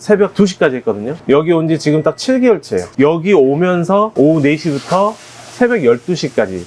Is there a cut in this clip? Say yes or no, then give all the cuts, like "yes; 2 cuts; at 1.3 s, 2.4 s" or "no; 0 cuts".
yes; 2 cuts; at 1.2 s, 2.9 s